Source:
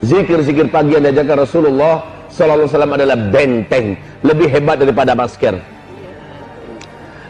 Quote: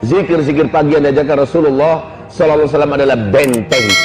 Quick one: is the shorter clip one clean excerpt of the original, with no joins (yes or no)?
yes